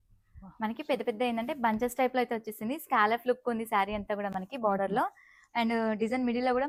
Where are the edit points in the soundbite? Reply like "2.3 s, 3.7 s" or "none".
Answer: none